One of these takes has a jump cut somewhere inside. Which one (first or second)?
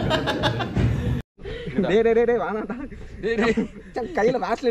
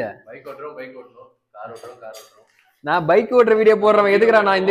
first